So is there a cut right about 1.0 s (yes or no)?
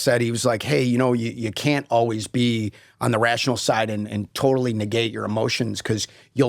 no